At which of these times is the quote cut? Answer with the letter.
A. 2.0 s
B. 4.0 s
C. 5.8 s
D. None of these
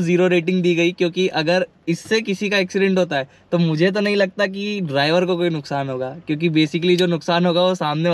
D